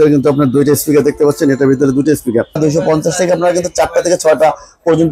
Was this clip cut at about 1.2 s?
no; 1 cut; at 2.6 s

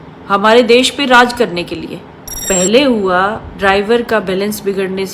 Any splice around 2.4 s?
yes; 1 cut; at 2.4 s

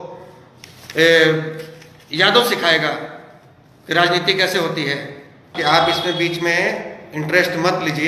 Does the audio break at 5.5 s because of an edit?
yes; 1 cut; at 5.5 s

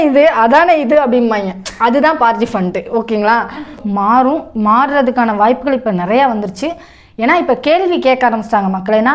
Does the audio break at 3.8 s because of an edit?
yes; 1 cut; at 3.8 s

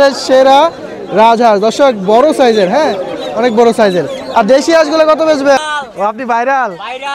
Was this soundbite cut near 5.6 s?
yes; 1 cut; at 5.6 s

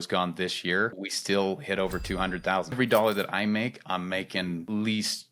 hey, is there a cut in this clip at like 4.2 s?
no; 2 cuts; at 1.0 s, 2.8 s

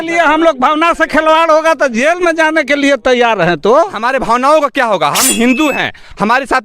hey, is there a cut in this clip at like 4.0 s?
yes; 1 cut; at 4.0 s

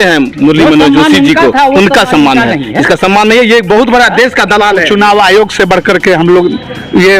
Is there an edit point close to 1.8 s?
no; 1 cut; at 4.9 s

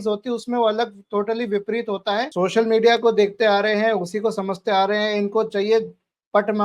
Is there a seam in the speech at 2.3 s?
yes; 1 cut; at 2.3 s

